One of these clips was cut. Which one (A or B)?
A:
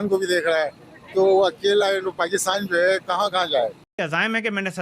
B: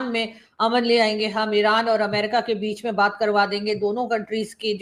A